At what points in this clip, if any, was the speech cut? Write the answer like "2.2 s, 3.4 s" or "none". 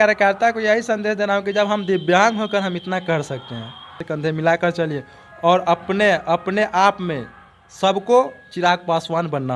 4.0 s